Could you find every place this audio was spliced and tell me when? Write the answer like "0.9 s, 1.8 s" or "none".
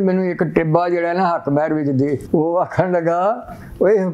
2.2 s